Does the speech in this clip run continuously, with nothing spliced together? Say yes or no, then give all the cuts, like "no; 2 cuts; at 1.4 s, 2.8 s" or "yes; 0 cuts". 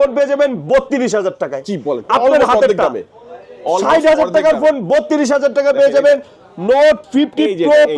yes; 0 cuts